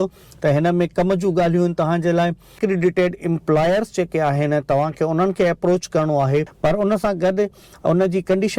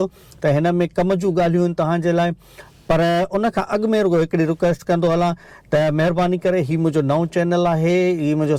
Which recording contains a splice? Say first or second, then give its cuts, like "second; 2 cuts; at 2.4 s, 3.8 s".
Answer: first; 2 cuts; at 2.6 s, 6.5 s